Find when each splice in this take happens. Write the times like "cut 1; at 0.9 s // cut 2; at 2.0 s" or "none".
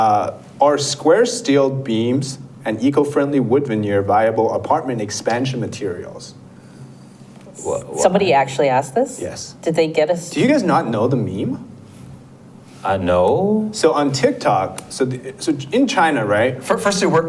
none